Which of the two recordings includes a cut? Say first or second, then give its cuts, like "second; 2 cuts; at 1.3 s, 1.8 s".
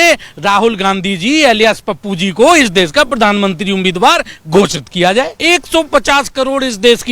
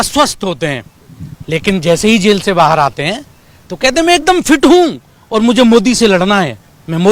first; 1 cut; at 5.4 s